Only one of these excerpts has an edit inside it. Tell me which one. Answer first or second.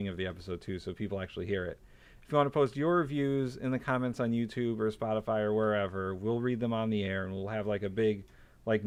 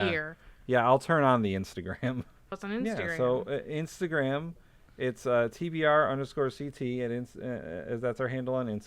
second